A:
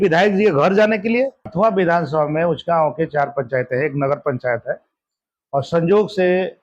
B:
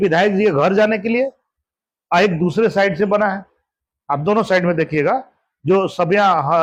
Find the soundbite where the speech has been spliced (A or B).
A